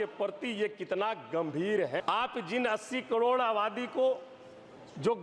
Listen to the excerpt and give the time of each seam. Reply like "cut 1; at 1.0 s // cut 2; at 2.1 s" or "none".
cut 1; at 2.0 s